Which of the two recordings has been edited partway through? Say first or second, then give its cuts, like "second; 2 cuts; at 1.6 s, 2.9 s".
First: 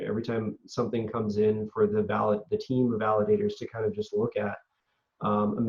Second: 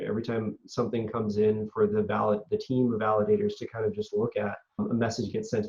second; 1 cut; at 4.8 s